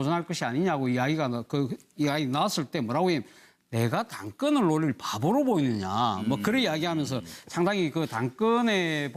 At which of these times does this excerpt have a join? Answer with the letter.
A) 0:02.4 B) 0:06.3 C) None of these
A